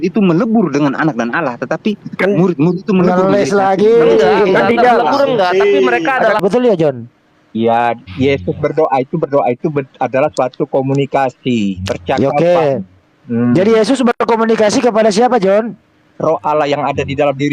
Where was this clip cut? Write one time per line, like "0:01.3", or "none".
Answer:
0:06.4

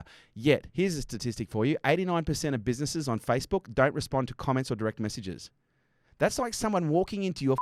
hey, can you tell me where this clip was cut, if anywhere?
none

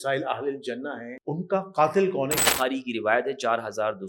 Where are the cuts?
0:01.1
0:02.4

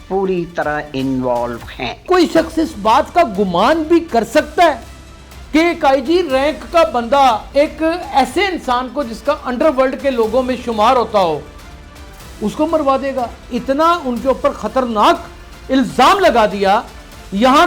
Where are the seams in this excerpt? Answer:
0:02.1
0:07.4
0:13.5

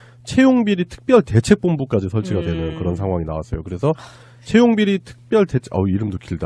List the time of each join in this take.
0:04.6

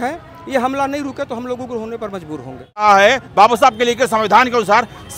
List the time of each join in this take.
0:02.8

